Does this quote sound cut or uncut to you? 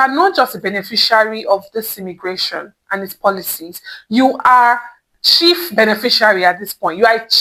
uncut